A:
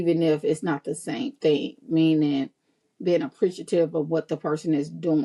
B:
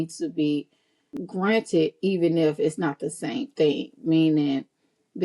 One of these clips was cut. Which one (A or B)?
B